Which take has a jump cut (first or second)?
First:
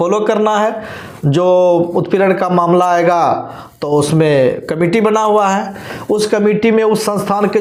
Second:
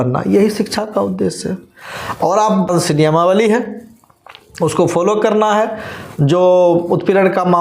second